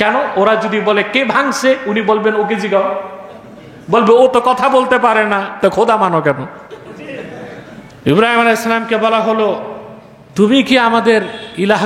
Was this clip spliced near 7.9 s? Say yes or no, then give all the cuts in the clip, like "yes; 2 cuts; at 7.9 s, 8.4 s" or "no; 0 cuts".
yes; 1 cut; at 7.9 s